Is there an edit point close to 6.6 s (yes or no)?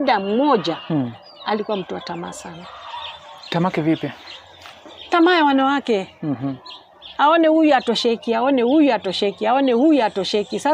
no